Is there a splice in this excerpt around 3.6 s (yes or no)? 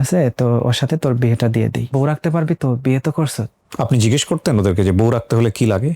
yes